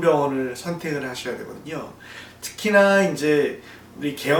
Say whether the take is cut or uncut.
uncut